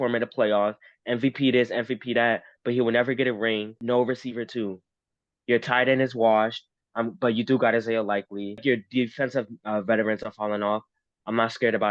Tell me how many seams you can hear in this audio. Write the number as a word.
two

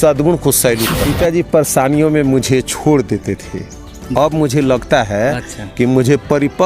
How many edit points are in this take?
one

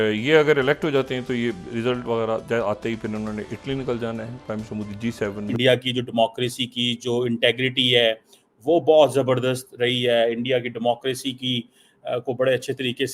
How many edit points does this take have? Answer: one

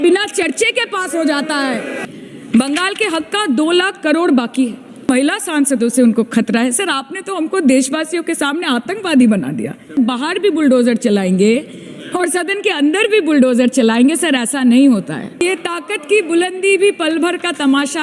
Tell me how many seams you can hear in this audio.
four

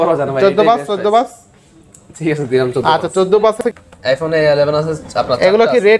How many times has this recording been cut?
one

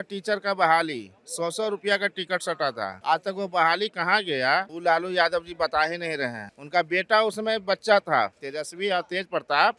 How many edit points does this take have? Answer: zero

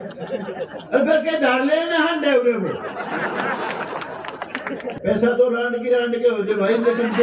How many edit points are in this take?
one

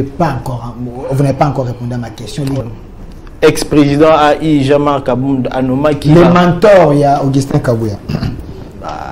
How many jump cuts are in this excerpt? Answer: one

